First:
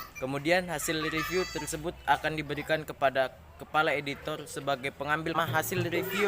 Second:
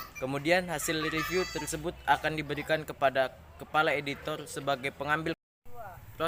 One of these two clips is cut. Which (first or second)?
first